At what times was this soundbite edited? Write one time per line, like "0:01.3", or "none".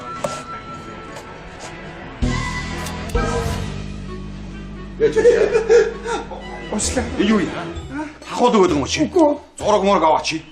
0:05.4